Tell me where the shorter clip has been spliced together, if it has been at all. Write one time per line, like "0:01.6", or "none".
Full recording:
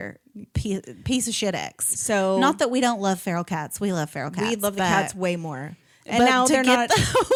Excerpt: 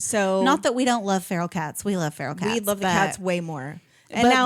none